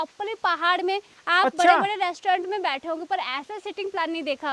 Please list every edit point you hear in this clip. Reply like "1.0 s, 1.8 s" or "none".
none